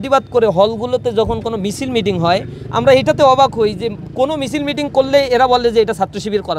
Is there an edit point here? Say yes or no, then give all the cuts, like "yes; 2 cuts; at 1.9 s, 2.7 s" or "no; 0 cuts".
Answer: no; 0 cuts